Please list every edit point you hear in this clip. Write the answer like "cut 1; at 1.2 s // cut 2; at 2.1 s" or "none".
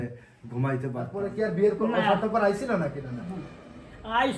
cut 1; at 1.2 s